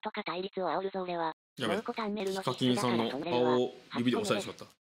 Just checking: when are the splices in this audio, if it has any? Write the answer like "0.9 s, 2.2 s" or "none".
2.2 s, 3.2 s